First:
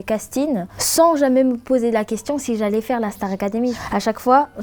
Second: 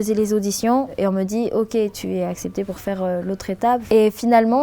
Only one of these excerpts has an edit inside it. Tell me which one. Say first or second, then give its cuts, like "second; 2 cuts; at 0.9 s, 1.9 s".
second; 2 cuts; at 2.0 s, 3.8 s